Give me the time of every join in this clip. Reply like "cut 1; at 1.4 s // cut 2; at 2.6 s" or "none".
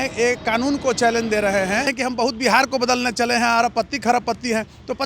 cut 1; at 1.9 s